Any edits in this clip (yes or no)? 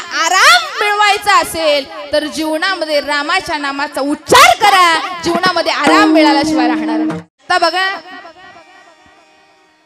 yes